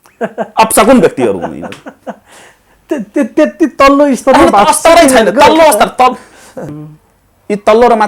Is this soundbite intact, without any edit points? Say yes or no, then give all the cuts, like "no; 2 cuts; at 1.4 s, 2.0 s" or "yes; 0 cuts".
no; 1 cut; at 6.7 s